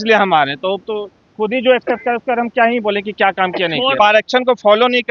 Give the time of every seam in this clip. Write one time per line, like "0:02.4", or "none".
0:04.0